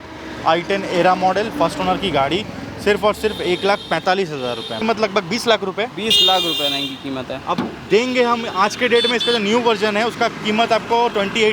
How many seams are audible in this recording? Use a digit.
1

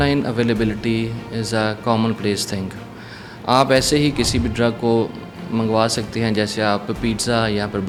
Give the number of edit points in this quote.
0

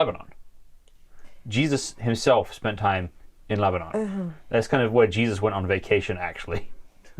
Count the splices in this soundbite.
0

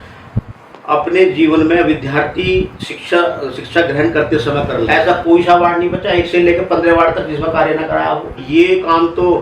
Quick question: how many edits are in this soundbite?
2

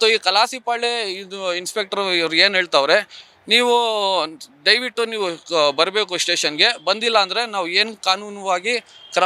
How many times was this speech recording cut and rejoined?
0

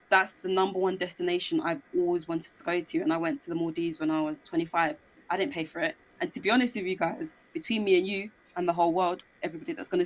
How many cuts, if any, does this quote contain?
0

